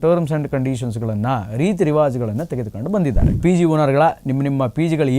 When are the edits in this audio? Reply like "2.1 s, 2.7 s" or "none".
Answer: 3.4 s